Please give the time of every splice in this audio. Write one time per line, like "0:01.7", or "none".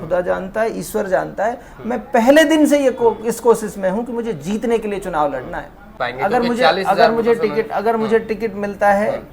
0:05.8